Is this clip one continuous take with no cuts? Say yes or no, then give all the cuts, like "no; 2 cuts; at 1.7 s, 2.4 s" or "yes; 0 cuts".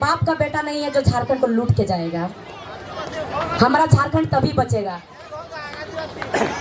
yes; 0 cuts